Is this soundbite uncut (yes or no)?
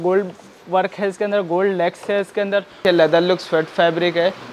no